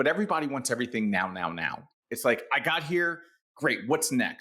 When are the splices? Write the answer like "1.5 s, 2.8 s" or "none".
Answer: 2.0 s